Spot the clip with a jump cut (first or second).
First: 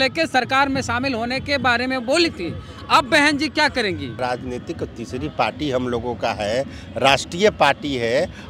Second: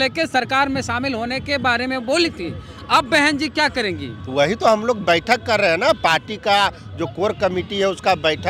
first